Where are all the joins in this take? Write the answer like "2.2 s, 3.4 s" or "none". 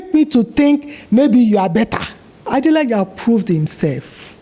2.4 s

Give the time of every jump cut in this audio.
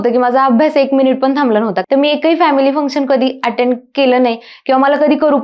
1.8 s

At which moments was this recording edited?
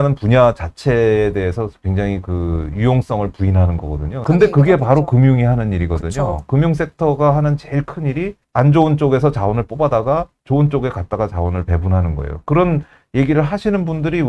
4.2 s, 8.4 s

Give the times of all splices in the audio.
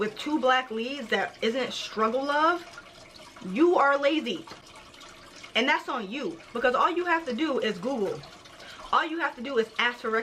none

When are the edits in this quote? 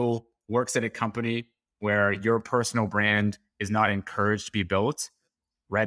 none

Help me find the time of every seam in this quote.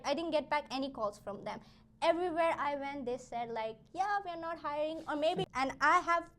5.5 s

